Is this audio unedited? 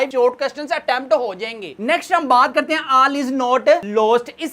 yes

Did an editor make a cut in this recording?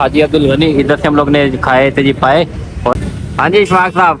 yes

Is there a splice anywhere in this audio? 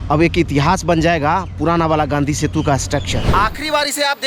yes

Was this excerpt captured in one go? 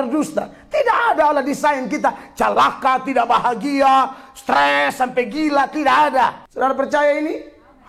no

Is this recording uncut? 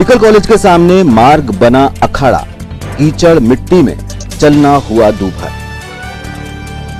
yes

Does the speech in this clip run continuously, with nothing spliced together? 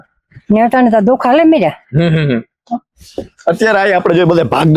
yes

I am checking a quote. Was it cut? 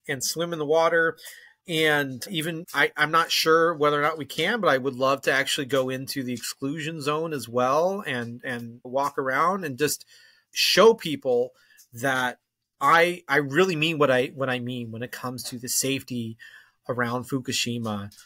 no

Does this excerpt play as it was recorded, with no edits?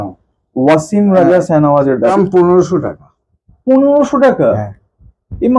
no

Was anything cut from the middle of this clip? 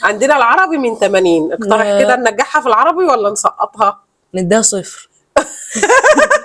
no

